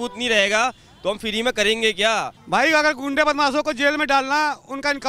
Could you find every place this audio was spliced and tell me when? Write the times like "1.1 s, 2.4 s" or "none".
2.4 s

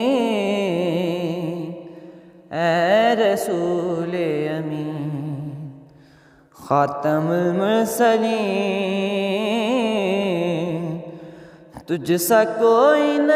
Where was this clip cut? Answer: none

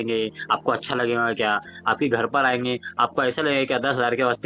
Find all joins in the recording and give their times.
none

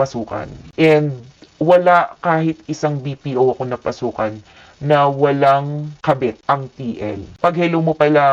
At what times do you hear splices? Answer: 7.2 s

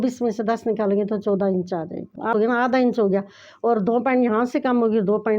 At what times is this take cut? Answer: 2.3 s

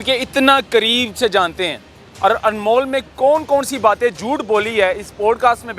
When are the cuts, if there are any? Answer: none

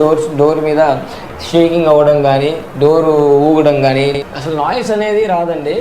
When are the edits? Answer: 4.1 s

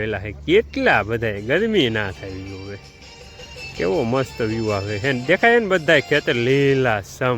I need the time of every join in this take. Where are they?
none

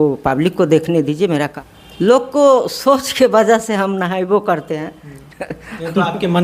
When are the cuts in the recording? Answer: 1.6 s

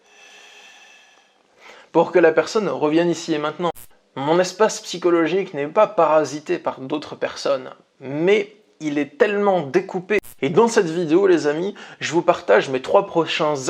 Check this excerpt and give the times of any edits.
3.9 s, 10.3 s

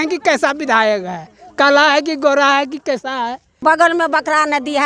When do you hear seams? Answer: 3.6 s

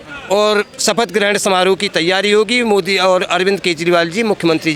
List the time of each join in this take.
none

